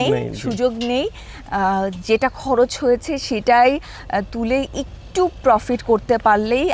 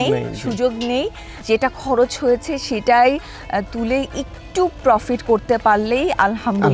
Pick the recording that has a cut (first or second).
second